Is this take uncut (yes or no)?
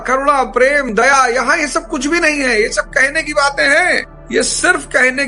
yes